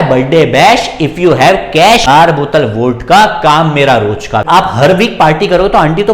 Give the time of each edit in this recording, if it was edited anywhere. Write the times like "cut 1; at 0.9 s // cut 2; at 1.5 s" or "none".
cut 1; at 2.1 s // cut 2; at 4.4 s